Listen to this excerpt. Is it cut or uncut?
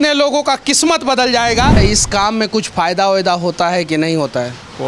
cut